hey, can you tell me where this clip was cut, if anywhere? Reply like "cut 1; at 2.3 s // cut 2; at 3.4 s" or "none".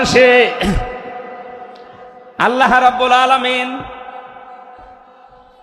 none